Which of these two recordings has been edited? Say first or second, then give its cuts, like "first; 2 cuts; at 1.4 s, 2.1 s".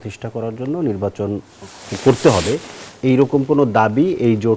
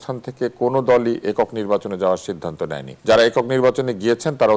second; 1 cut; at 2.9 s